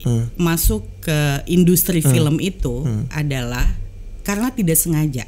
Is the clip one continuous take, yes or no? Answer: yes